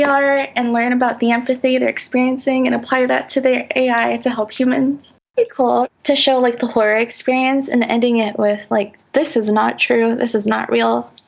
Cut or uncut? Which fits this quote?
cut